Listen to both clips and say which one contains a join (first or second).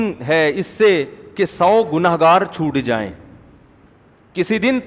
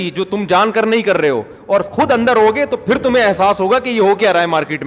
first